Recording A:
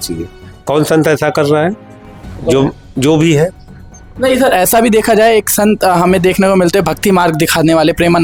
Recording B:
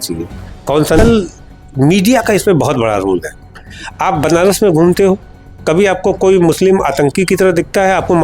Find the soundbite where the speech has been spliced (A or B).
B